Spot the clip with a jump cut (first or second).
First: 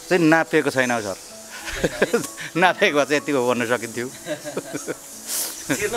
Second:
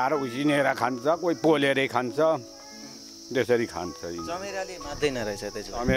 second